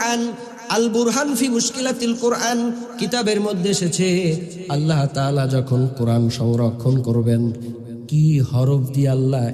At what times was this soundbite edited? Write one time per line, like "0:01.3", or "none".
none